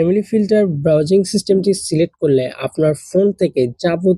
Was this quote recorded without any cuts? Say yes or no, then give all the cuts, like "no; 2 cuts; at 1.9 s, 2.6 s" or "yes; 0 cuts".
yes; 0 cuts